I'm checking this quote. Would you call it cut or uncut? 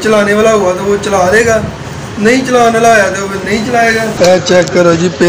cut